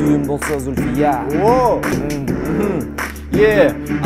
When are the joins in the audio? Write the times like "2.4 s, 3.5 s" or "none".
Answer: 1.9 s